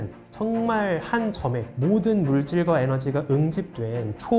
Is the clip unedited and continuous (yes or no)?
yes